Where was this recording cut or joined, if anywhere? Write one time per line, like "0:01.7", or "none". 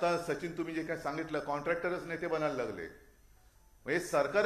none